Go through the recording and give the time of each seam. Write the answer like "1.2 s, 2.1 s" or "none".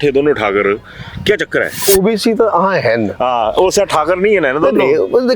1.8 s